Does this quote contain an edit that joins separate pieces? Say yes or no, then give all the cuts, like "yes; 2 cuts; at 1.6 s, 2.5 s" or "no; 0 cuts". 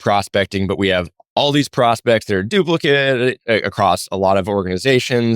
yes; 1 cut; at 1.2 s